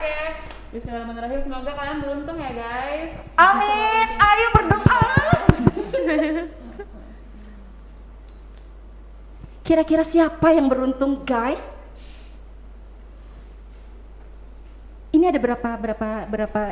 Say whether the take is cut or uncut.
uncut